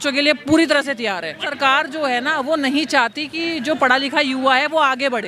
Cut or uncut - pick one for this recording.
cut